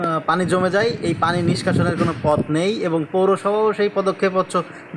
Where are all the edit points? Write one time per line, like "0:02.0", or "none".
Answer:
none